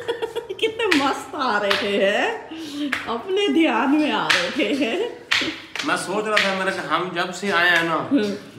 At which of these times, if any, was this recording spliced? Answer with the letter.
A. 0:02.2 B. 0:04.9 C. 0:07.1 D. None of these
D